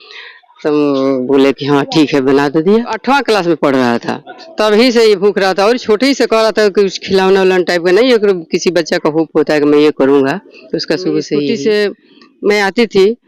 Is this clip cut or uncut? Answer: cut